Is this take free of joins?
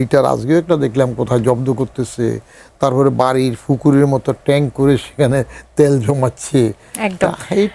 yes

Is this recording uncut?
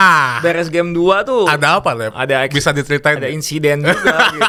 yes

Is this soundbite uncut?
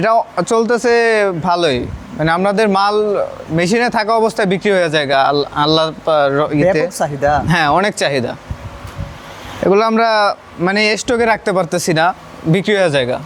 yes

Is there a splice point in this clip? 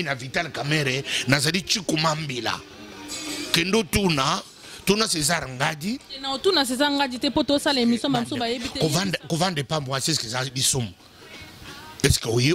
yes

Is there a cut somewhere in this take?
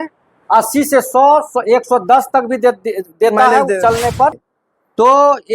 yes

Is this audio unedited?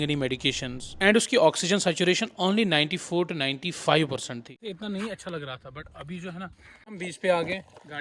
no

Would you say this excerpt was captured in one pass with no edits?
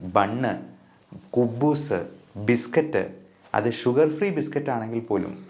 yes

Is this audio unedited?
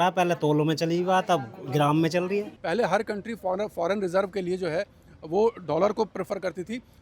no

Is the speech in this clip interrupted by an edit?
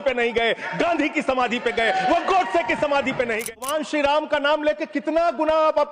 yes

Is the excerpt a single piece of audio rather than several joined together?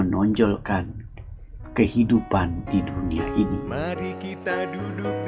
no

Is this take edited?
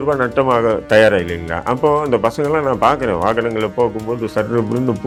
no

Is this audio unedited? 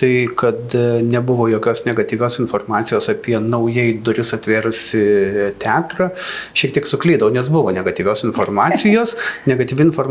yes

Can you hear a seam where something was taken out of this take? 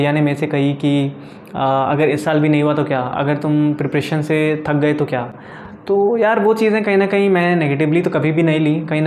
no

